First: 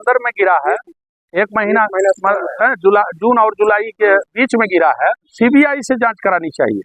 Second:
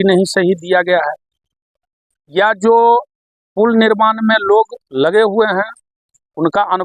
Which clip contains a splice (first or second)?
first